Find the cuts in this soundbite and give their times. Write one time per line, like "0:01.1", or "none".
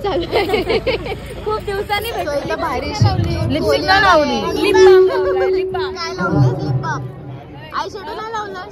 0:02.2